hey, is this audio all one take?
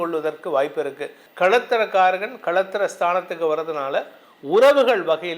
no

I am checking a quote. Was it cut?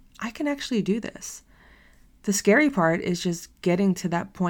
no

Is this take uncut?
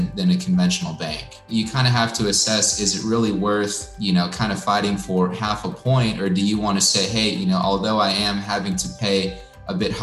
no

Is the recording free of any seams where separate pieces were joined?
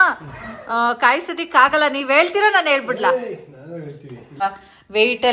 no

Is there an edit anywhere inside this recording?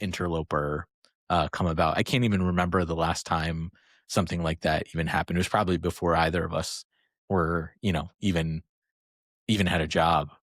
no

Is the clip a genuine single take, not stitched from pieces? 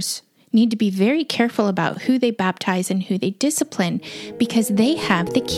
yes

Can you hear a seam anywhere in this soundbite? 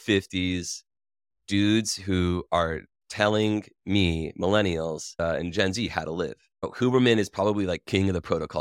no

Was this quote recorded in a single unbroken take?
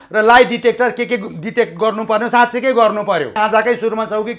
no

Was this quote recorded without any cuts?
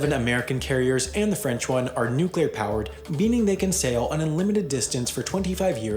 yes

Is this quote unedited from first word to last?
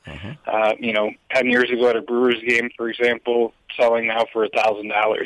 no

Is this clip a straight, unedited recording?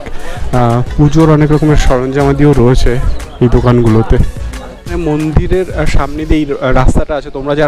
no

